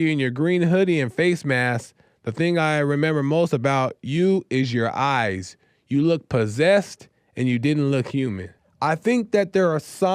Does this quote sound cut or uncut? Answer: cut